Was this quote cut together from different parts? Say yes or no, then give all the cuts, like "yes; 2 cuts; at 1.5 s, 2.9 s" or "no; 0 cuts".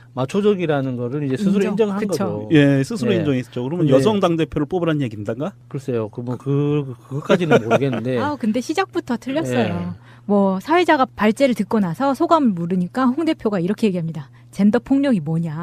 no; 0 cuts